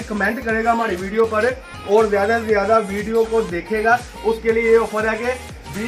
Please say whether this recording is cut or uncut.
uncut